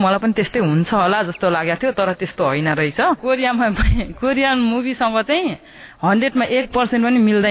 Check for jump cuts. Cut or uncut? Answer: cut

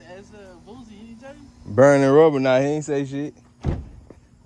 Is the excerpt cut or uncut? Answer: uncut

